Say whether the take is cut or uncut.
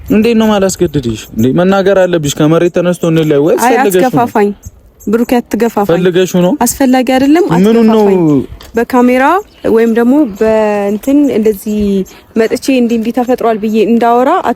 uncut